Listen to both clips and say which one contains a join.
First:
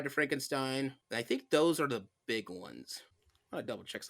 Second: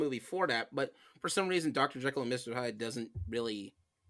first; 1 cut; at 1.0 s

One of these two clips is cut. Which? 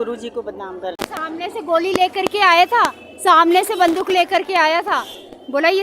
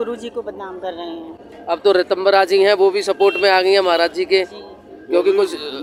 first; 1 cut; at 1.0 s

